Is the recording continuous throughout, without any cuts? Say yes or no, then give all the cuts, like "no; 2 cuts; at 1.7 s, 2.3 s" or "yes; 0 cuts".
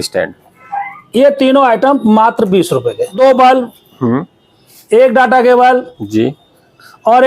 no; 1 cut; at 3.1 s